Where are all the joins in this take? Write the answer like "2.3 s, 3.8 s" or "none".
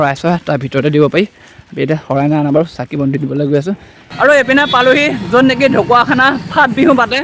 4.0 s